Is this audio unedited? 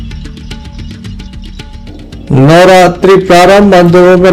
no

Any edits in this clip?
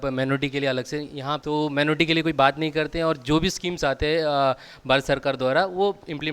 yes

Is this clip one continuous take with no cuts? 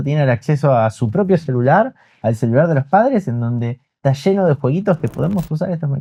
yes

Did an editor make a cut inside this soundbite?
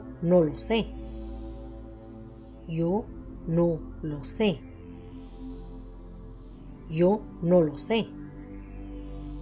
no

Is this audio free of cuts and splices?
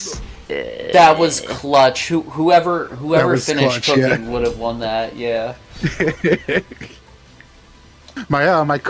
yes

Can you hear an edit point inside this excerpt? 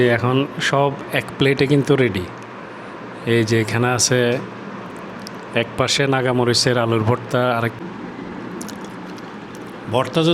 yes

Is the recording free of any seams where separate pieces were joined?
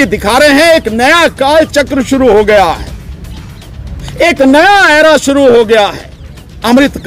yes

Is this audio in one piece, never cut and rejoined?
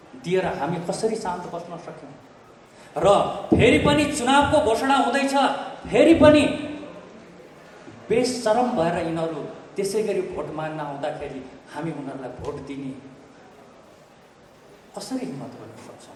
yes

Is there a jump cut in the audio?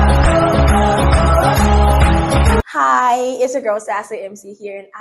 yes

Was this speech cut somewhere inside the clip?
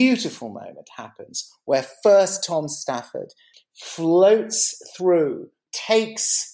yes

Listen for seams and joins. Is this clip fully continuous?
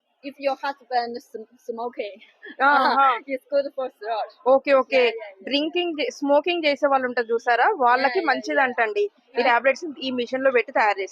no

